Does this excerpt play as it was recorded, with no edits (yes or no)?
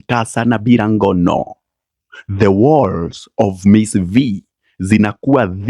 yes